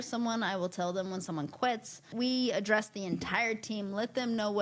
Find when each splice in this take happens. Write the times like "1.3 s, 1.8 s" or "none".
2.0 s